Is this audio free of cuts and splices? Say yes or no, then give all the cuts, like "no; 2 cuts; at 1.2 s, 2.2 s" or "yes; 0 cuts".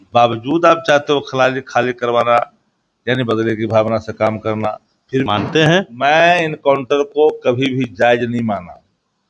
no; 1 cut; at 5.3 s